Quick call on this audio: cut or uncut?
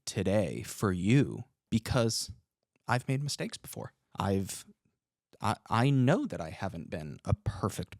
cut